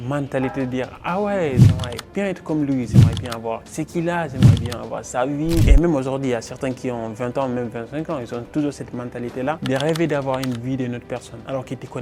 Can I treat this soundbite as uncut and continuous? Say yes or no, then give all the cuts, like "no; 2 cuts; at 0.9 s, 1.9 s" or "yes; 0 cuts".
yes; 0 cuts